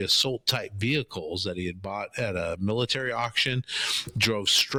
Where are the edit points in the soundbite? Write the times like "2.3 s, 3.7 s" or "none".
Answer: none